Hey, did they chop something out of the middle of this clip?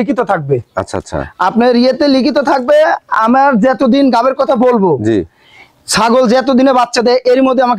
no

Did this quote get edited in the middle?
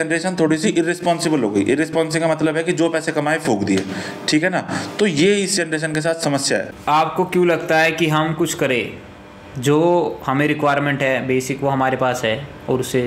no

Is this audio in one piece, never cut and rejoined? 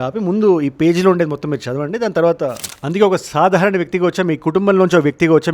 no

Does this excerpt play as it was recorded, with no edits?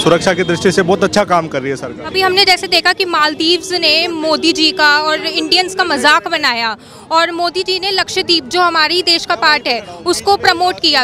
yes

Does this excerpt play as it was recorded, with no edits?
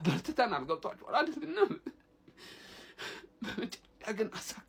yes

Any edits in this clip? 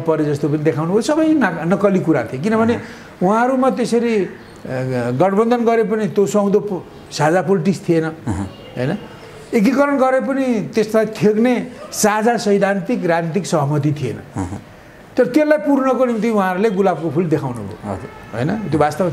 no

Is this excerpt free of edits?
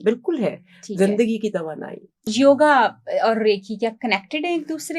no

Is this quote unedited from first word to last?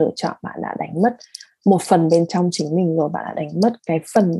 yes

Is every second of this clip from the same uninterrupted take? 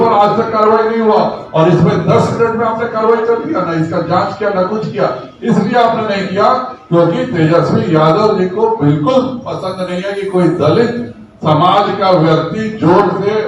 yes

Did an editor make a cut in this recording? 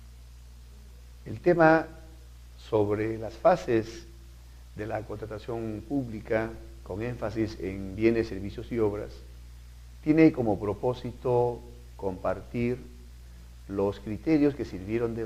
no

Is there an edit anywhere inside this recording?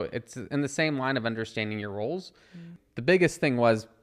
yes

